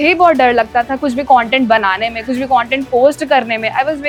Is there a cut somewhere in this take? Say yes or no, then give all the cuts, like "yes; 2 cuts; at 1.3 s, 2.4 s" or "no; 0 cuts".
no; 0 cuts